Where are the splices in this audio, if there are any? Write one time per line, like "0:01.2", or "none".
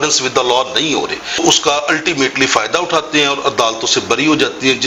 none